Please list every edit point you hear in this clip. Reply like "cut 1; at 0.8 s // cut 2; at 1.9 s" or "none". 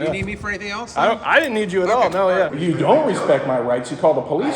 cut 1; at 2.5 s